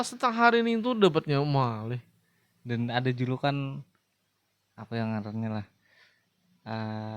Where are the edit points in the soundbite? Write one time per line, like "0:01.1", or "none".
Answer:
none